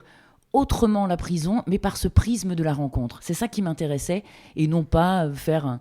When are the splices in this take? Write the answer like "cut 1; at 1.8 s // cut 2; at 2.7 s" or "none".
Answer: none